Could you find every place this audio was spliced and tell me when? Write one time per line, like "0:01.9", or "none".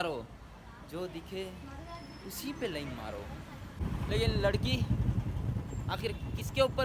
0:03.8